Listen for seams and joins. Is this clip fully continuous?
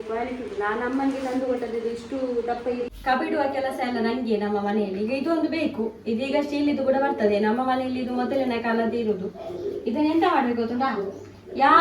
no; 1 cut; at 2.9 s

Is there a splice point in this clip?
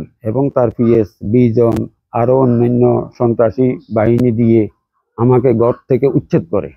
no; 0 cuts

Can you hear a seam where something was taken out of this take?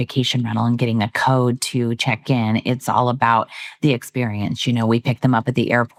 no; 0 cuts

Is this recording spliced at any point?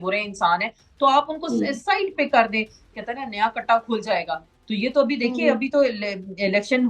yes; 1 cut; at 2.9 s

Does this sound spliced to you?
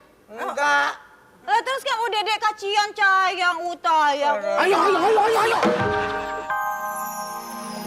yes; 1 cut; at 6.3 s

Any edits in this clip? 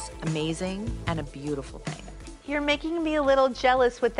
yes; 1 cut; at 2.3 s

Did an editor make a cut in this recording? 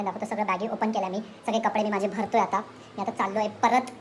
no; 0 cuts

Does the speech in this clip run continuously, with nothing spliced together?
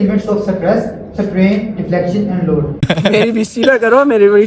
no; 1 cut; at 2.9 s

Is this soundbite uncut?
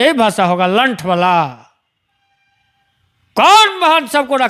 yes; 0 cuts

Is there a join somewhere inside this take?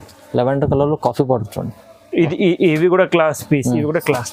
no; 0 cuts

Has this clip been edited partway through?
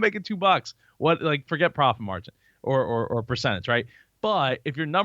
yes; 1 cut; at 4.0 s

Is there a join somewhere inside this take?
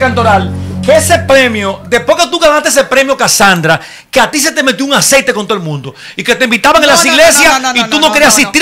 no; 0 cuts

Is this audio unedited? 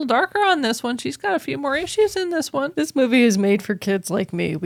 yes; 0 cuts

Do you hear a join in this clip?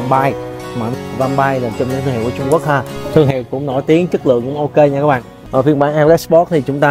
yes; 2 cuts; at 0.9 s, 5.3 s

